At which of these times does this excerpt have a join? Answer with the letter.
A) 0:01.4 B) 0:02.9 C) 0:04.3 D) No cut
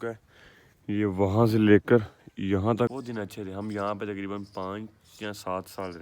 B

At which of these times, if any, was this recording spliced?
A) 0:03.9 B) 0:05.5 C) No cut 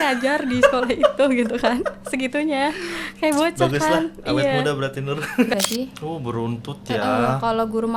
B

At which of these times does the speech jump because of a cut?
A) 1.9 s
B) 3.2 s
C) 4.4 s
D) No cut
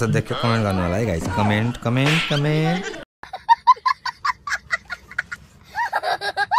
B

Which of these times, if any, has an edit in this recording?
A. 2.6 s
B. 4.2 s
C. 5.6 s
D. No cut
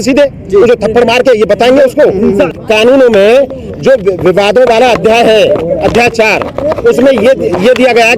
A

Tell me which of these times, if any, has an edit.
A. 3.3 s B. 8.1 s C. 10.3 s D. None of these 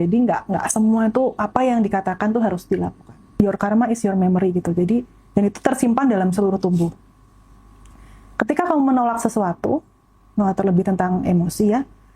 A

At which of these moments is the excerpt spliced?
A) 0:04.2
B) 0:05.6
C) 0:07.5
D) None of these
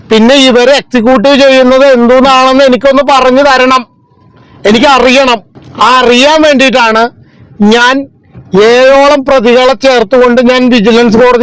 B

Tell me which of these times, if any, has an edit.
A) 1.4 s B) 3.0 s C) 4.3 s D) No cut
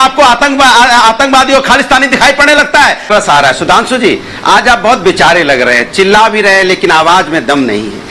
B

